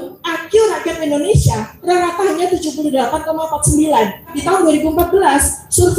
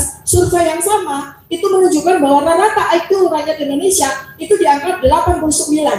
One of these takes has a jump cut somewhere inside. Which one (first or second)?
first